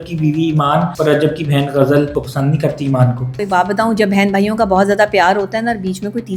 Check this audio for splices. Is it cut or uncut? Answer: cut